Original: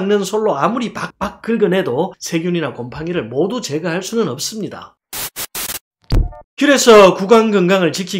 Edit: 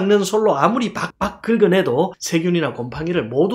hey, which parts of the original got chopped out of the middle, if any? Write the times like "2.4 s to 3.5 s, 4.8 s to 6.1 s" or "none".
none